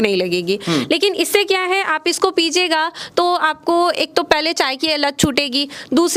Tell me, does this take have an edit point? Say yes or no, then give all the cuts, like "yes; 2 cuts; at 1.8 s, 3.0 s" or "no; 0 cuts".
no; 0 cuts